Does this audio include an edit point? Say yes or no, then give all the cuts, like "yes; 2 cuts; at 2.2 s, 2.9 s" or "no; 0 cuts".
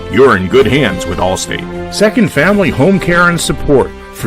yes; 1 cut; at 1.6 s